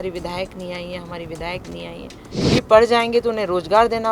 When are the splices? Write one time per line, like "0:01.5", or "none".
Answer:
0:02.3